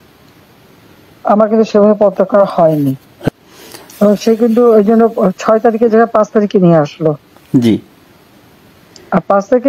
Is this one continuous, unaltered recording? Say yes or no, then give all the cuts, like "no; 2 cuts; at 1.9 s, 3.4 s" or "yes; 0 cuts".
no; 1 cut; at 3.3 s